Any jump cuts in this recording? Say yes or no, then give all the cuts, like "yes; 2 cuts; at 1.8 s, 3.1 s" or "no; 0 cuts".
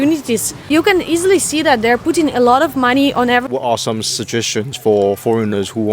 yes; 1 cut; at 3.4 s